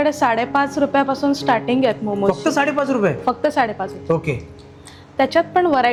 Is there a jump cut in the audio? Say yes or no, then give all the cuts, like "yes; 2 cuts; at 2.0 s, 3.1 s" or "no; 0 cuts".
no; 0 cuts